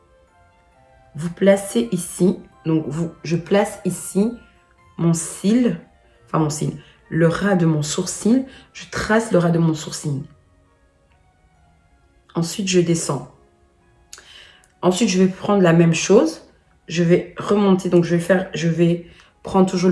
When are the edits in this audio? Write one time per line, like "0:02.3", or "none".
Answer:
none